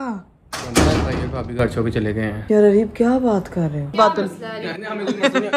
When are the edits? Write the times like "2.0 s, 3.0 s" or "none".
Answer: 2.4 s, 3.9 s

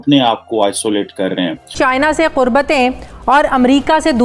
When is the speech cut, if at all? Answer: 1.8 s

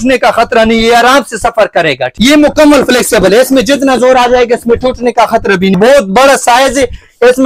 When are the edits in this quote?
2.1 s, 5.7 s

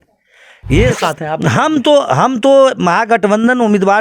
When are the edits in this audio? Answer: 0.9 s

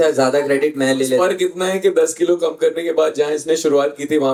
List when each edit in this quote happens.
none

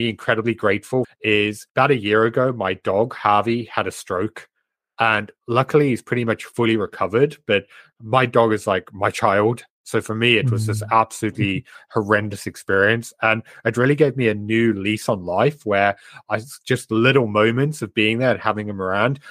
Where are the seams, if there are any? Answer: 1.2 s

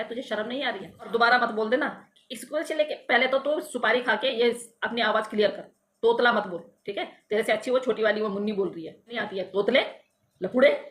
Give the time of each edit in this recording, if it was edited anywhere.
1.1 s, 9.2 s

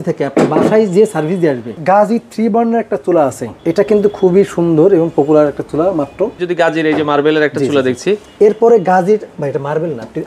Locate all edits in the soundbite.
1.8 s, 3.5 s, 6.4 s

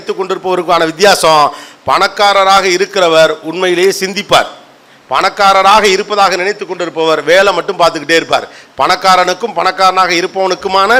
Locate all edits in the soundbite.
none

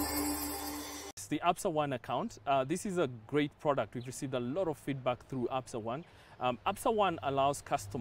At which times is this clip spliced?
1.2 s

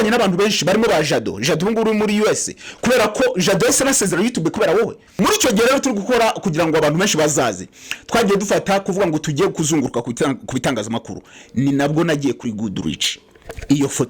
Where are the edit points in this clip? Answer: 5.0 s

